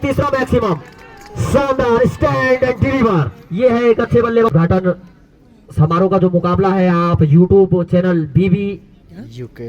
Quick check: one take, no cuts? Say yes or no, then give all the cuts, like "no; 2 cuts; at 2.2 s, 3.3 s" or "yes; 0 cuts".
no; 1 cut; at 4.5 s